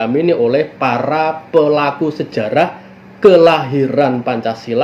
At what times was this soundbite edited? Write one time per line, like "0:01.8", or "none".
none